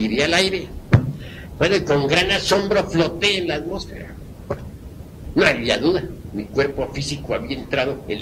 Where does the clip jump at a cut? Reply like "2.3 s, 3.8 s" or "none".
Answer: none